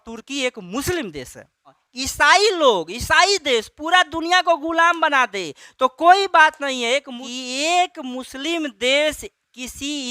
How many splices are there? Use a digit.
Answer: 2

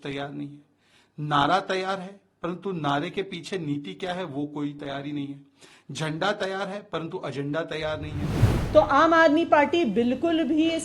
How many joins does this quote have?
1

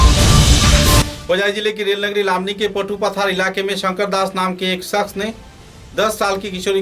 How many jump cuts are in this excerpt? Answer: 1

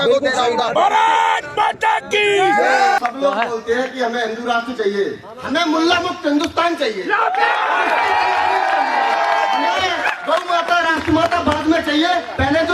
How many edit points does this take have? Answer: 1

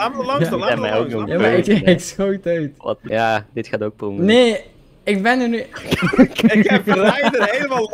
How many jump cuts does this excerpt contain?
1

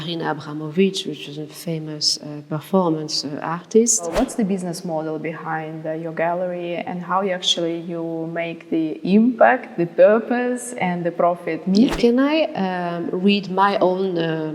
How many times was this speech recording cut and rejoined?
2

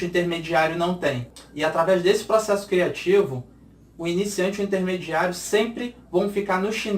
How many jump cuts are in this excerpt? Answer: 1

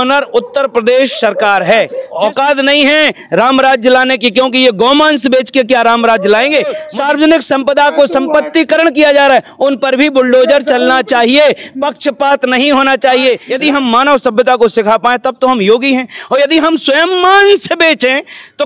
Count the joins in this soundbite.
3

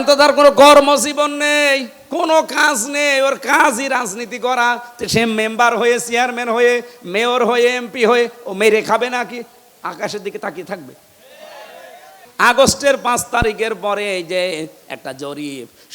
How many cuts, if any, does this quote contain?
2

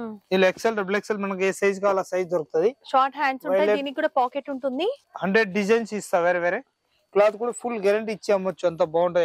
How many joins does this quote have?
1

